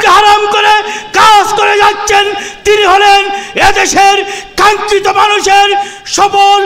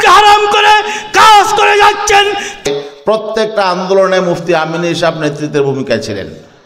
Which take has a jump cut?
second; 1 cut; at 2.6 s

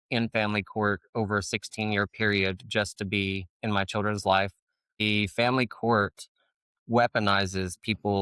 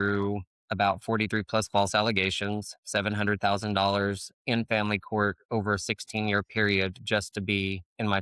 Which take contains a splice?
first; 1 cut; at 4.9 s

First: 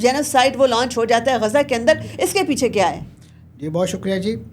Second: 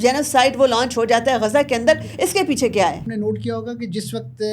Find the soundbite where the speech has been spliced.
second; 1 cut; at 3.0 s

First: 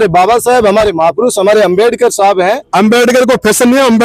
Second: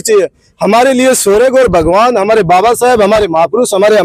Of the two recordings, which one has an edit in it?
first; 1 cut; at 2.6 s

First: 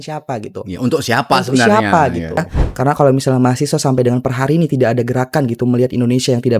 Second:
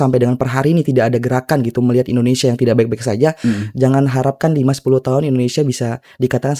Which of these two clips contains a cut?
first; 1 cut; at 2.6 s

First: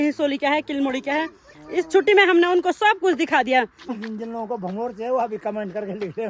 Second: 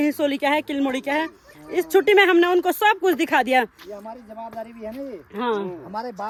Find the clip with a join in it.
first; 1 cut; at 3.9 s

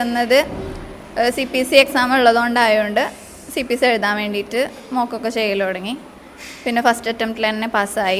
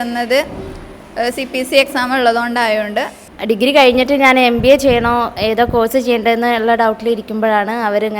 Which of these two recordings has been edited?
second; 1 cut; at 3.3 s

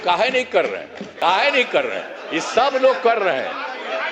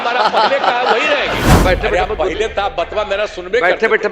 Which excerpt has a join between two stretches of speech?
second; 1 cut; at 1.5 s

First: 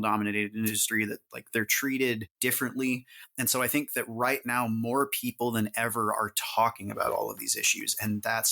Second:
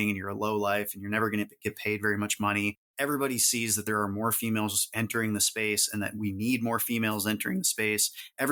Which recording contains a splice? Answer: first; 1 cut; at 2.3 s

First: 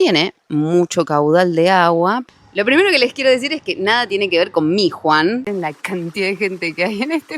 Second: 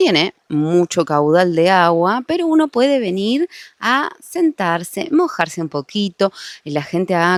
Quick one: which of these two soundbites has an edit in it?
first; 2 cuts; at 2.2 s, 5.5 s

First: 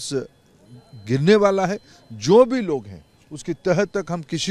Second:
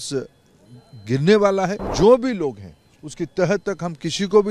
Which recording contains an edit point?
second; 1 cut; at 1.8 s

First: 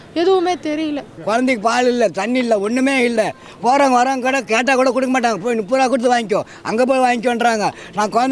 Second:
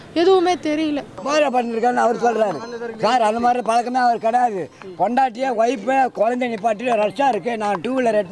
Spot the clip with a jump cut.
first; 1 cut; at 1.1 s

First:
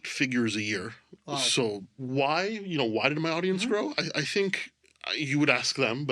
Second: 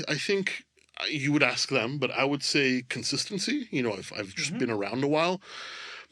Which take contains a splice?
first; 1 cut; at 2.0 s

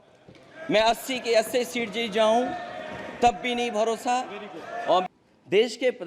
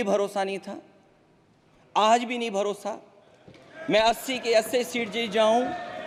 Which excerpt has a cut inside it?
first; 1 cut; at 5.0 s

